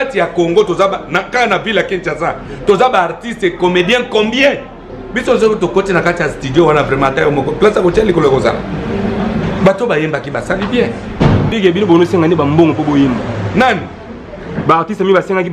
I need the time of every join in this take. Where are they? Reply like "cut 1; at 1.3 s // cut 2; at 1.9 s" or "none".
cut 1; at 11.5 s